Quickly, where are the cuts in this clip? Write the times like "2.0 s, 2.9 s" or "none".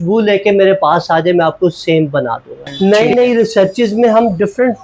2.9 s

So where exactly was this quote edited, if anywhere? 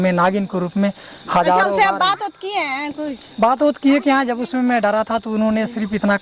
none

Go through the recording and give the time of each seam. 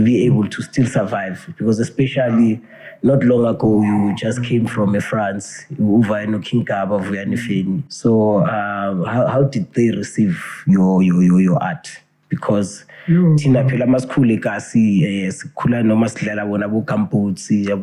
7.9 s

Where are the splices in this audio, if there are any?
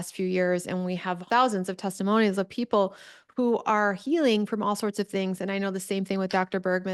1.2 s

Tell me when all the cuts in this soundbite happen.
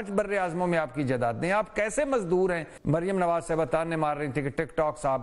2.7 s

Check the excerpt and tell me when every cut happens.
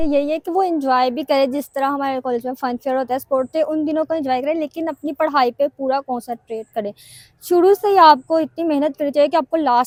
none

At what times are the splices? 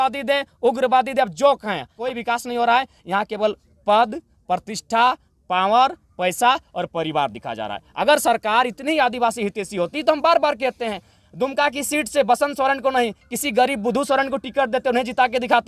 1.9 s

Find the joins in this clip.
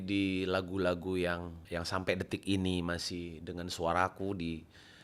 1.6 s

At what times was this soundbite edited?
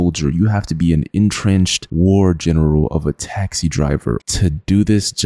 4.2 s

